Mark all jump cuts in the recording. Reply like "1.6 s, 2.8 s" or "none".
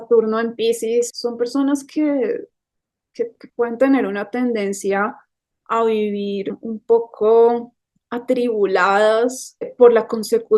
1.1 s, 6.6 s, 9.7 s